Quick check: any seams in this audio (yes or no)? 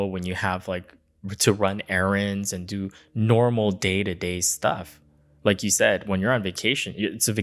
no